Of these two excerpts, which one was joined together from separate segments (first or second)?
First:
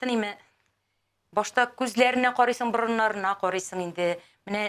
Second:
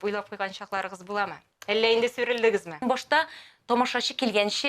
second